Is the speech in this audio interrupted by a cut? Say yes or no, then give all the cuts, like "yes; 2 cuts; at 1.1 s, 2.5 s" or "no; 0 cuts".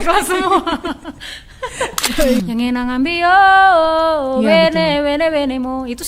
yes; 1 cut; at 2.4 s